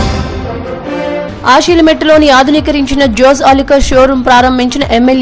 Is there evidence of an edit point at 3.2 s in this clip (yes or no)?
no